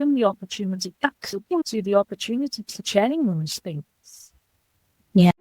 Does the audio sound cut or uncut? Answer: cut